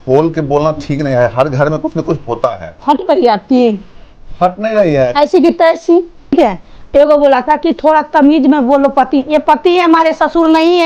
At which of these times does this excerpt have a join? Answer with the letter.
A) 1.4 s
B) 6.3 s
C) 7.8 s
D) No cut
B